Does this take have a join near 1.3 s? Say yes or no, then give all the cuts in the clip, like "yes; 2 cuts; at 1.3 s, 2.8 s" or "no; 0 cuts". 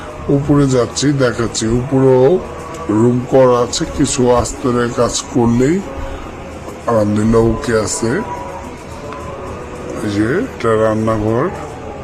no; 0 cuts